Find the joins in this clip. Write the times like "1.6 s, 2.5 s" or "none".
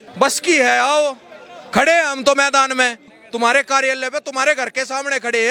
3.2 s